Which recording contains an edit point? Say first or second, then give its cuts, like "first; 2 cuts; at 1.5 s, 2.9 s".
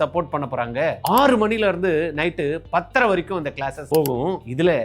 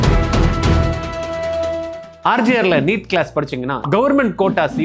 second; 1 cut; at 2.1 s